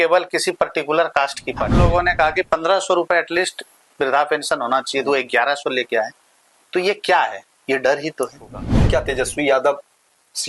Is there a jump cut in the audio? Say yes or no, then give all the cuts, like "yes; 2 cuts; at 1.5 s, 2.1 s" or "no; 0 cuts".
yes; 2 cuts; at 1.7 s, 8.7 s